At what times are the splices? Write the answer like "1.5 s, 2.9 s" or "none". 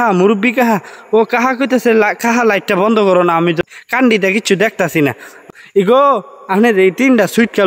3.6 s, 5.4 s